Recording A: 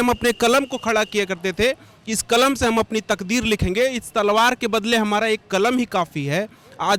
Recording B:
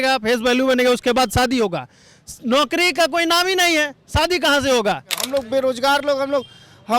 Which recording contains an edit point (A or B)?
B